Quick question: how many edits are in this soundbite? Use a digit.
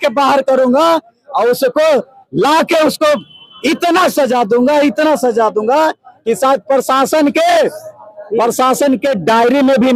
0